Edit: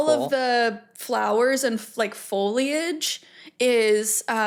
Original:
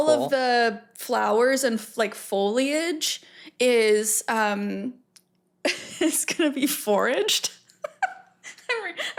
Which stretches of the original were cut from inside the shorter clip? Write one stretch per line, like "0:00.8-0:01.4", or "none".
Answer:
none

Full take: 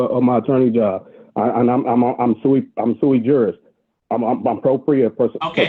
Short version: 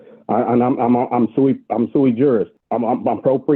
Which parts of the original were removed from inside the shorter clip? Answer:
0:03.7-0:04.0

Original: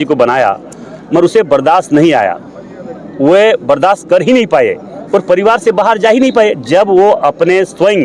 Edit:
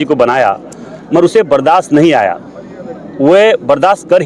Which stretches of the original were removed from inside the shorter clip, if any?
none

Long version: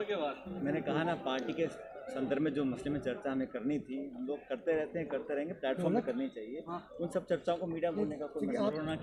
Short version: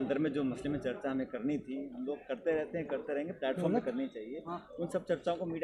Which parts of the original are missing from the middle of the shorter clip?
none

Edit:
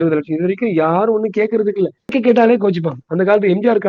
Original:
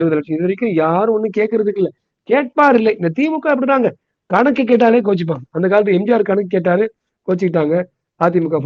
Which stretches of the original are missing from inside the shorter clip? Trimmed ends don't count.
0:02.1-0:04.5

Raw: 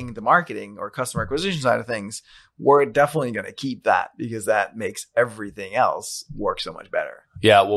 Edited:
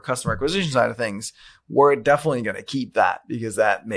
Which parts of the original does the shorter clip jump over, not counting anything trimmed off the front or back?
none

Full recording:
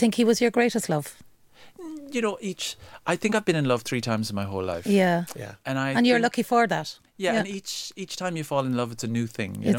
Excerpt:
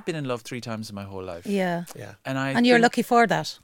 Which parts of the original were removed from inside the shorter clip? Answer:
none

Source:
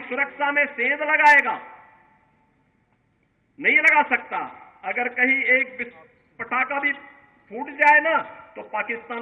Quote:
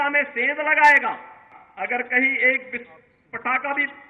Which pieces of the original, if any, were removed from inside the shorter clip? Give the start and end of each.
0:02.0-0:04.7

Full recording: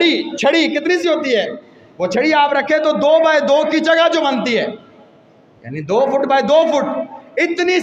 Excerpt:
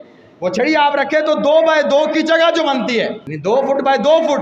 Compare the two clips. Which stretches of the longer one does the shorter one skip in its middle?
0:04.8-0:05.7

